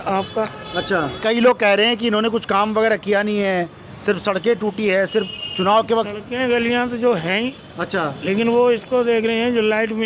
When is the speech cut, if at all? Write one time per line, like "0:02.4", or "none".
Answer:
0:01.2